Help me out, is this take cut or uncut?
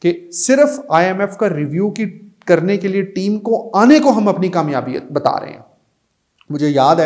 uncut